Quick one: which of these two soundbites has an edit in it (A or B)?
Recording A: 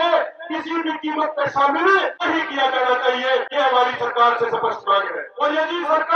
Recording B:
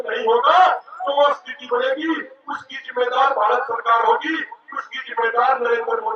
A